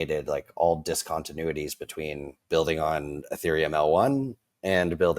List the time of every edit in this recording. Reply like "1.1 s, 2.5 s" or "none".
2.3 s

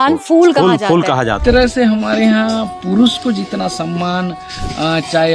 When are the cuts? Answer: 1.4 s

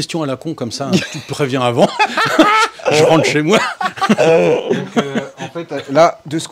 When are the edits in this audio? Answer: none

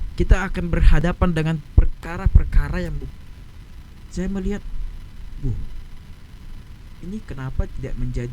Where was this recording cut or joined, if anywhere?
3.1 s

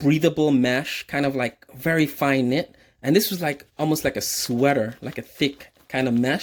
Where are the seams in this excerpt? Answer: none

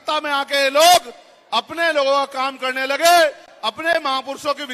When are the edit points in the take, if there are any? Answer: none

